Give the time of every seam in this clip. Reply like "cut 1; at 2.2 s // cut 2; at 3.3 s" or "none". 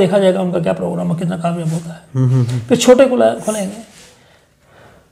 none